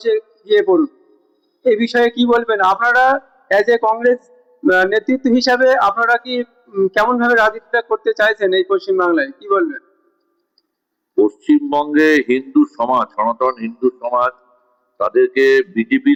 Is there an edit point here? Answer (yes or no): no